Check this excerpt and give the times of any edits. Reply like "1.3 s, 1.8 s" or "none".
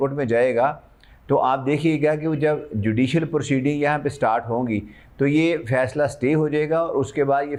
none